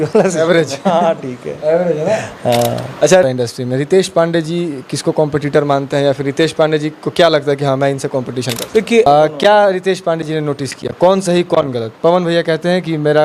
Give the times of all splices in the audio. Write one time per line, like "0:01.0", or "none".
0:03.2
0:09.1

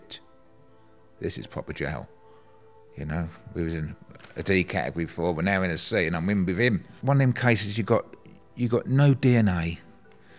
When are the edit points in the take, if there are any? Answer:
0:06.9

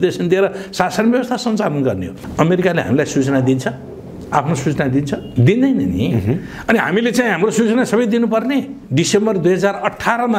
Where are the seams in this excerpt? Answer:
0:02.2
0:05.3
0:08.8

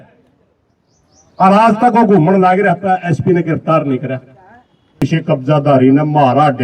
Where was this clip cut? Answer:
0:05.0

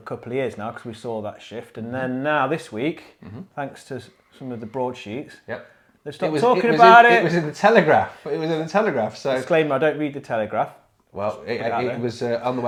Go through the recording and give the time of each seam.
none

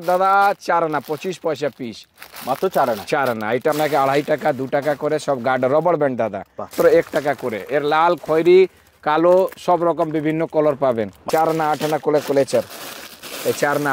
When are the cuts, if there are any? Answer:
0:03.7
0:06.7
0:11.1

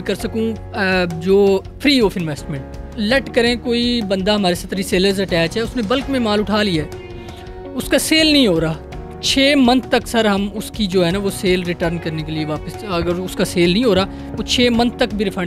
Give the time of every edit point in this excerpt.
0:02.9

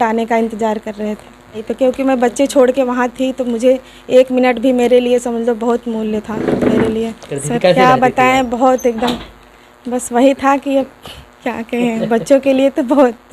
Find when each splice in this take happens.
0:01.7
0:07.3

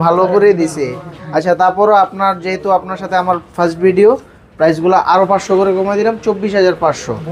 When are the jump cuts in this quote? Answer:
none

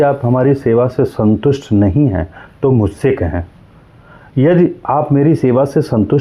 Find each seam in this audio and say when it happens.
none

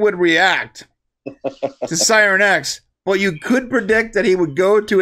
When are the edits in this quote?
none

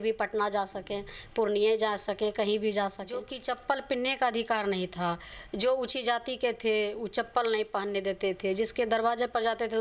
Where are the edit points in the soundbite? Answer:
0:03.3

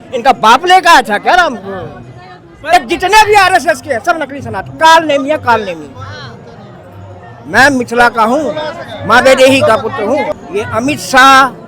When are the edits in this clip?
0:02.5
0:10.3

